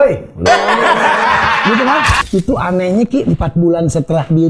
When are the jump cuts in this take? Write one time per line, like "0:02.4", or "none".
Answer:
0:02.2